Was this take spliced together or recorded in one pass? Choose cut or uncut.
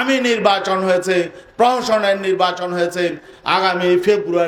uncut